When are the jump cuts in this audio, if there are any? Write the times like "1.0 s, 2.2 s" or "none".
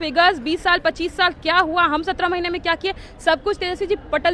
none